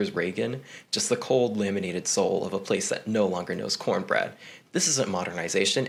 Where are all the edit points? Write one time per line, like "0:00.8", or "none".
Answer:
none